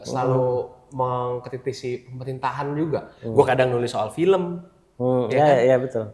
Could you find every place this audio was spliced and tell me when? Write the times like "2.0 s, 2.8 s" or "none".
none